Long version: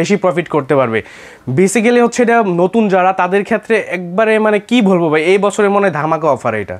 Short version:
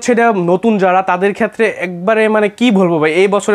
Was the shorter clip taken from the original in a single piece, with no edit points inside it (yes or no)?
yes